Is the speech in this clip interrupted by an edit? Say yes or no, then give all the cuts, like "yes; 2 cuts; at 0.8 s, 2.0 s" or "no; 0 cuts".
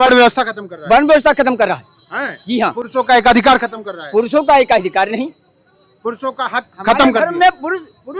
no; 0 cuts